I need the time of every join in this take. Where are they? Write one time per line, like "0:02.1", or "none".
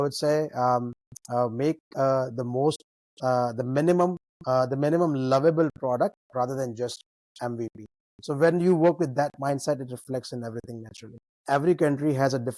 0:11.4

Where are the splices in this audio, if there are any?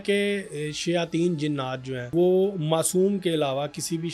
0:02.1

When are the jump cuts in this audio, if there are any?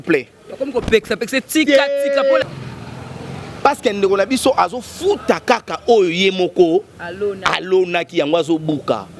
0:02.4

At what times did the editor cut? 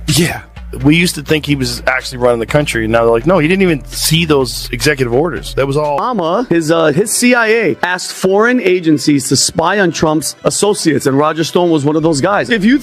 0:05.8

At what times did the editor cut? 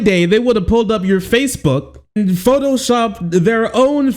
0:02.2

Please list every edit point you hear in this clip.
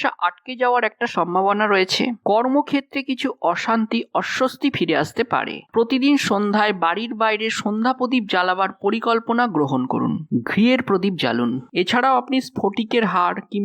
0:05.7
0:11.7

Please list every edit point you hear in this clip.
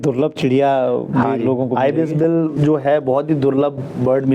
none

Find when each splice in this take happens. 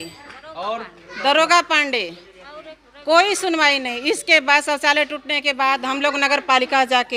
none

